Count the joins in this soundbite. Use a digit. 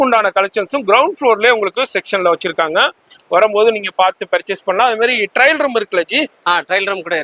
0